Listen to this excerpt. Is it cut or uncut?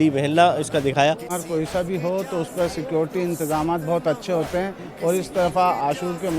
cut